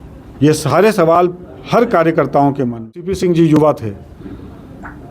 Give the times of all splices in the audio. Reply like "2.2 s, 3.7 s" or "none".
3.1 s